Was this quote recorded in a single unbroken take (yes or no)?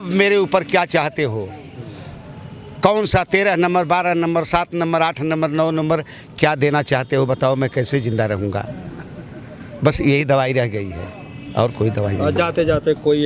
yes